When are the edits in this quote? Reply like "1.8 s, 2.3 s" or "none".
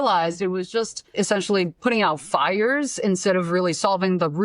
1.1 s